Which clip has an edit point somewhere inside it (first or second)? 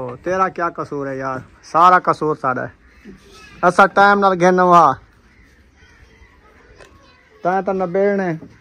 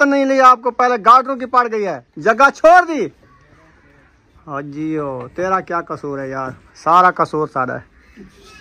second